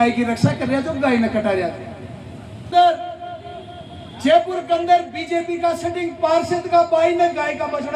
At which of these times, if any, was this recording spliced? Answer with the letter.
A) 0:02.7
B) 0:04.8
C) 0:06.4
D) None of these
A